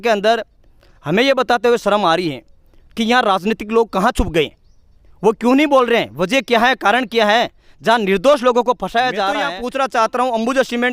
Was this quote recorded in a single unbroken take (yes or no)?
no